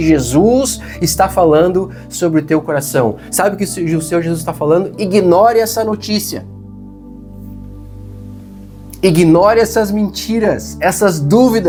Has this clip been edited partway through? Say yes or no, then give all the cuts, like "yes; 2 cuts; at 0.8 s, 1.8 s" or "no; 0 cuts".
no; 0 cuts